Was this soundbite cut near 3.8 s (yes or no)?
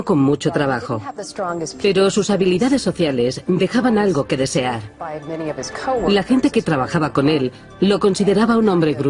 yes